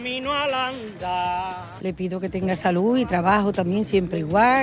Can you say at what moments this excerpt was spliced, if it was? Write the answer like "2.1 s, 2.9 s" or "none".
1.9 s